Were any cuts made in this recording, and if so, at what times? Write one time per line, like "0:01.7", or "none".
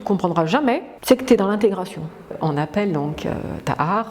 0:00.9
0:02.3

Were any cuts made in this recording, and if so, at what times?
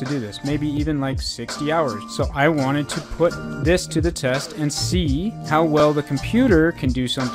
0:02.0

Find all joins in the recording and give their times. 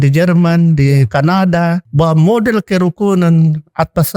0:01.8

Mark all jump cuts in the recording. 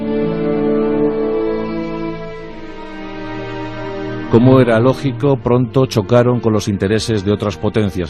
0:05.5

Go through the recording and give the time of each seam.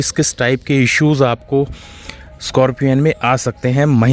none

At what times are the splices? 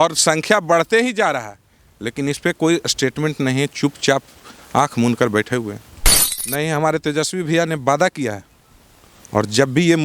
0:06.2

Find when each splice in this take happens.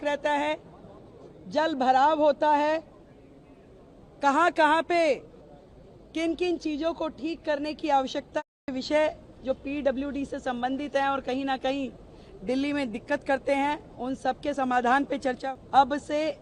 0:08.7
0:15.4

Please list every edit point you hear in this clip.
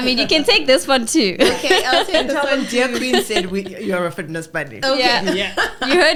none

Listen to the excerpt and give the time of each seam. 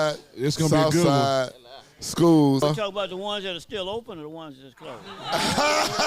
0:02.6

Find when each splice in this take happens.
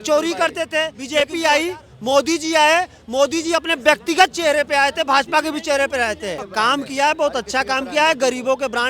0:01.0
0:06.4

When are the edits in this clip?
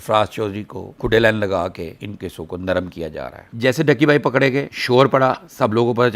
0:03.4

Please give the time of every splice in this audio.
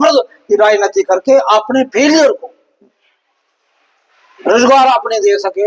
none

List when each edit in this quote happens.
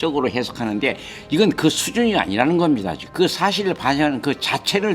0:03.0

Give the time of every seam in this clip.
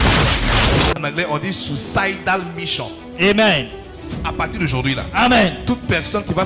0:01.1

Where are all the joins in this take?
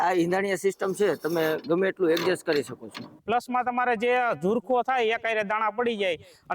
0:03.2

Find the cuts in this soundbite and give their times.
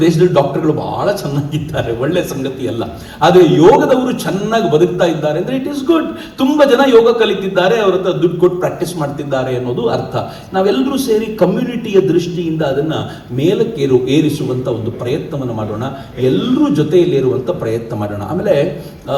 none

